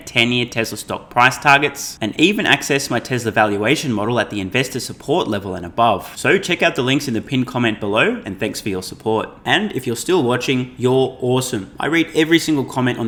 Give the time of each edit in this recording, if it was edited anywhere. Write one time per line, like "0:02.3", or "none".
none